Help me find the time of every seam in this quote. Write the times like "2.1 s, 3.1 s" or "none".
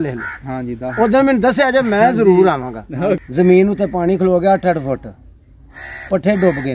3.2 s